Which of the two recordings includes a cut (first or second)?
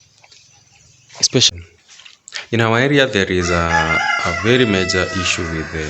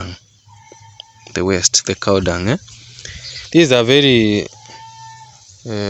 first